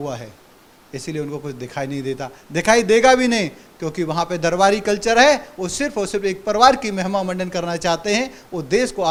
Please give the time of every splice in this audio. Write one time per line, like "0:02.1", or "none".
none

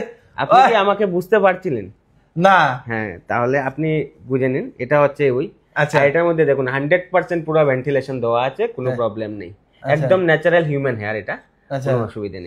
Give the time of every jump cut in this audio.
none

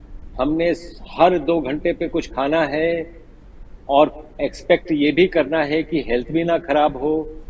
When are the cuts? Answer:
none

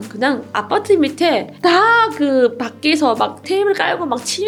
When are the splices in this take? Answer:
none

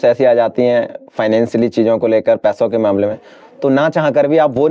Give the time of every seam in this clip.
none

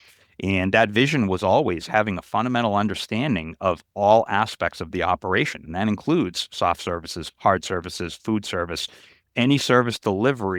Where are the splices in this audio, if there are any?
none

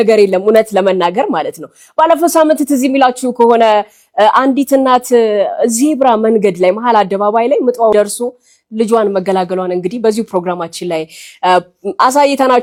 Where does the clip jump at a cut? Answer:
none

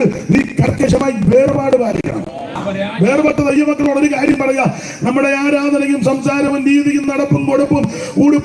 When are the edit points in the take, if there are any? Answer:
0:02.6

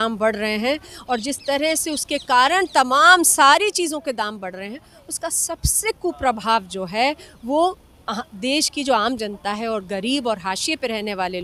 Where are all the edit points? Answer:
none

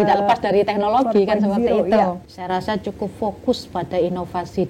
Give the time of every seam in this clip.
0:02.3

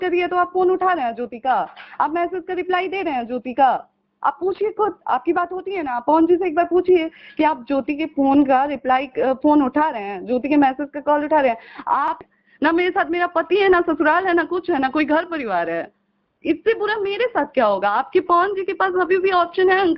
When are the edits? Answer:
0:12.2

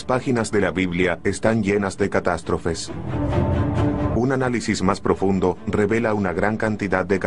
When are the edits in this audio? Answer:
0:01.9

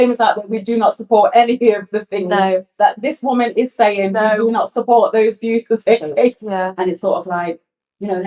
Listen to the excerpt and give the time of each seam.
0:06.4

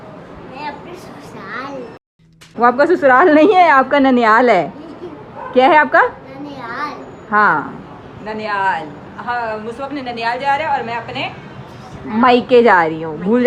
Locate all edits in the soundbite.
none

